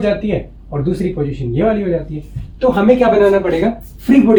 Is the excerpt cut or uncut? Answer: uncut